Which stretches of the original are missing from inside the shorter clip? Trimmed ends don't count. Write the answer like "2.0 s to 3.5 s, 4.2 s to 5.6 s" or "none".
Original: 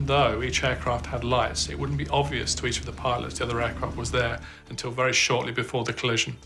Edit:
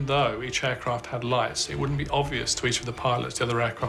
none